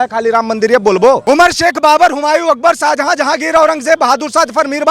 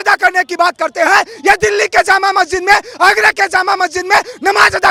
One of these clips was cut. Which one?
first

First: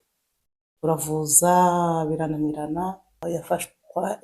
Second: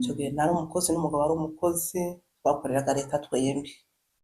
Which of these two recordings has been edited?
first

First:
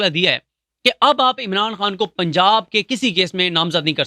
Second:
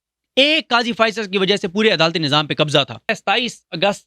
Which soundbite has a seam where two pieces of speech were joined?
second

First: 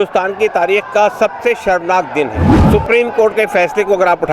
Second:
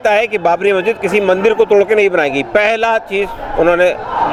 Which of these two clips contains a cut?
first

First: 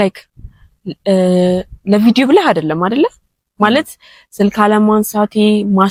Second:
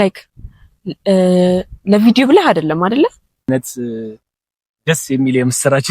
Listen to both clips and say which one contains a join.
second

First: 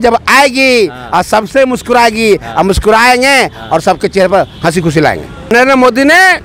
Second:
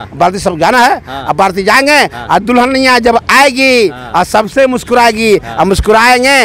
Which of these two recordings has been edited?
first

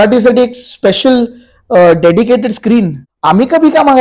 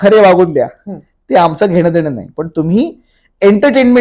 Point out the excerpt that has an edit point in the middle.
first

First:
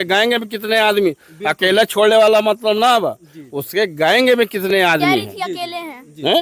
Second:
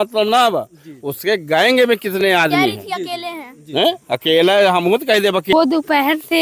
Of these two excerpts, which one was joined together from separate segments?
second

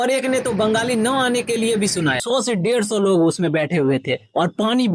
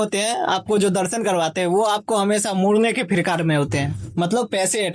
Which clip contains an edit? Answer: first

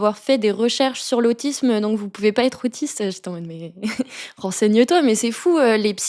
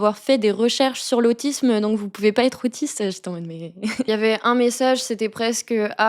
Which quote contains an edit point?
second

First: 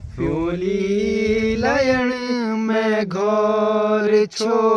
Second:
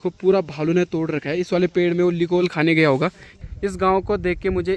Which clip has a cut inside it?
second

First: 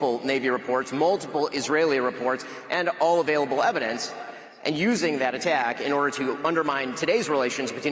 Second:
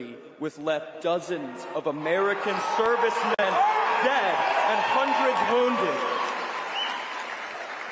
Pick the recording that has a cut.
second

